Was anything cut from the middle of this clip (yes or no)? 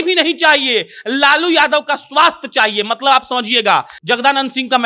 yes